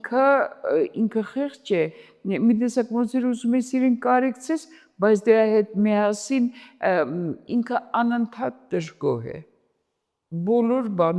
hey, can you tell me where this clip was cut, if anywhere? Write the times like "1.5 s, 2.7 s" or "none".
none